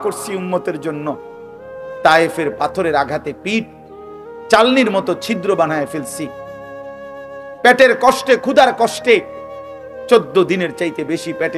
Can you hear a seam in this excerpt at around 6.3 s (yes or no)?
yes